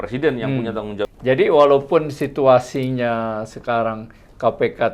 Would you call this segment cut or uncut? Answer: cut